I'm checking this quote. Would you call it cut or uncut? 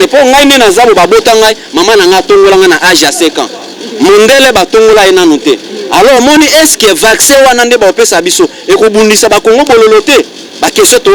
uncut